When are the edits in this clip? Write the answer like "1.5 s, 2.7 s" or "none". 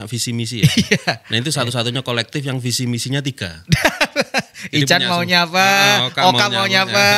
none

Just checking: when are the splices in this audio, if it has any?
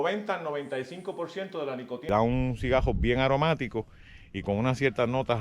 2.1 s

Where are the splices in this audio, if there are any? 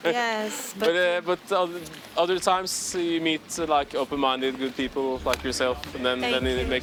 none

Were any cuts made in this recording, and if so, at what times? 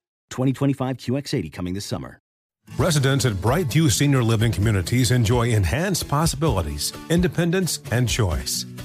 2.4 s

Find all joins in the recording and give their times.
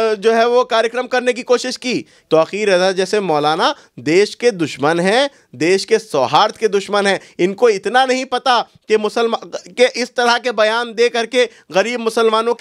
2.2 s

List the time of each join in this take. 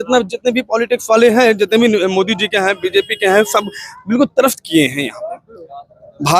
none

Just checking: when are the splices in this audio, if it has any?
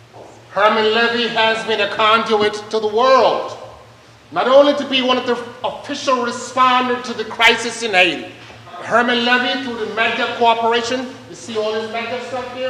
8.8 s

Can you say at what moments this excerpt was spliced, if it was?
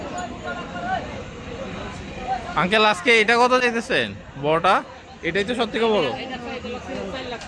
none

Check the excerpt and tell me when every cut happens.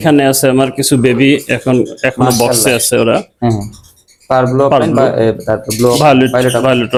none

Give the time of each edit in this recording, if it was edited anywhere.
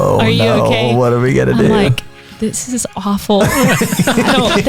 none

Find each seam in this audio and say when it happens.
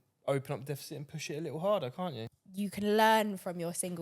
2.2 s

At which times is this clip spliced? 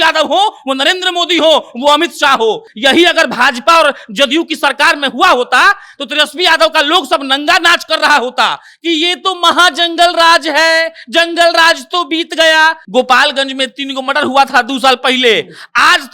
2.7 s, 12.8 s

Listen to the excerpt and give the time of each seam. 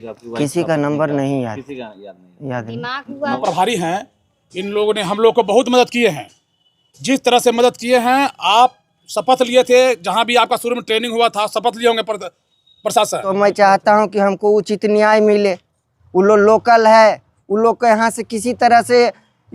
3.4 s, 13.3 s

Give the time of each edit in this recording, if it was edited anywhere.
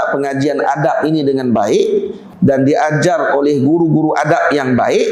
2.2 s

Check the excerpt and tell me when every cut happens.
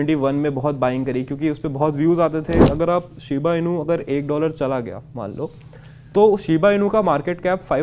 2.6 s

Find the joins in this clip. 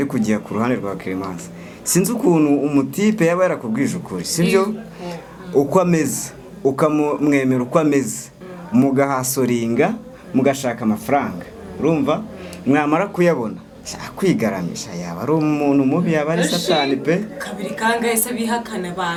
none

